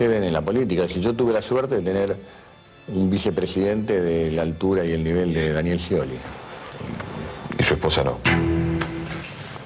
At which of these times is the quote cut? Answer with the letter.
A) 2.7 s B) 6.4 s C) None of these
C